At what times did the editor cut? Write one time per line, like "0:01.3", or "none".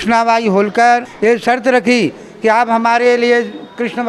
0:01.1